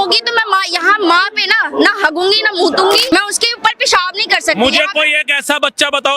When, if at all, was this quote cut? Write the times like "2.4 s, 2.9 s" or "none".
3.1 s